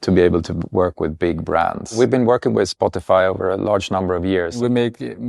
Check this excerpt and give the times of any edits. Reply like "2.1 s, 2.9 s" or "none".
1.9 s, 4.6 s